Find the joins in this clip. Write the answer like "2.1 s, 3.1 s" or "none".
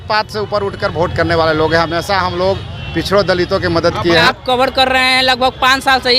4.3 s